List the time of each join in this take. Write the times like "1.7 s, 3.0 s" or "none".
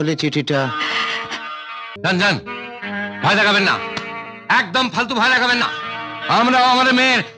1.8 s